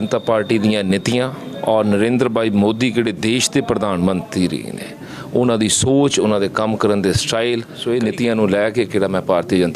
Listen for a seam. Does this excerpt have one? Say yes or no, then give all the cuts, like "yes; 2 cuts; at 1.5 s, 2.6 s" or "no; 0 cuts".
yes; 1 cut; at 7.7 s